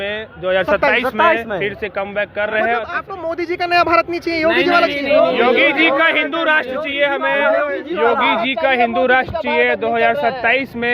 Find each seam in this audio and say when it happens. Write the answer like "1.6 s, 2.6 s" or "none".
2.9 s